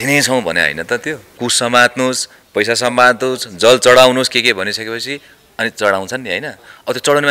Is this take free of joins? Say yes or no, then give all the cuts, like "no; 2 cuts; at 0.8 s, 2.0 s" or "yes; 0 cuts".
no; 1 cut; at 1.3 s